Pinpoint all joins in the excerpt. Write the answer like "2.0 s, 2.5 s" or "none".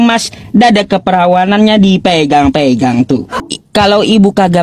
3.4 s